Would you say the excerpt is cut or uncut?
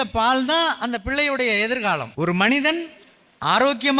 cut